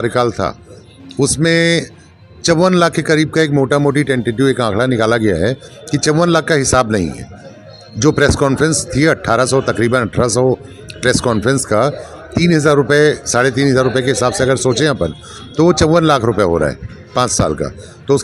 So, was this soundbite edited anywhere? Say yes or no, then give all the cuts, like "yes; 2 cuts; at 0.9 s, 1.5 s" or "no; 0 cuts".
no; 0 cuts